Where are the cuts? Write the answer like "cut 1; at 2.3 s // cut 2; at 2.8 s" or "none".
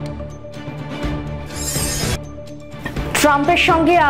cut 1; at 1.6 s